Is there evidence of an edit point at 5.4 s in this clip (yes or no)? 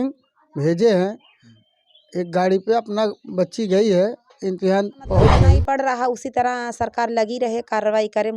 yes